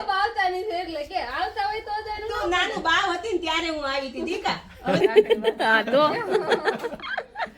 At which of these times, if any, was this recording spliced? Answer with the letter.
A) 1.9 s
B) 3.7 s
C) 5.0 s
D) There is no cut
C